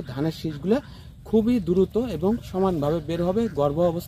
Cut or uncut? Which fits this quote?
uncut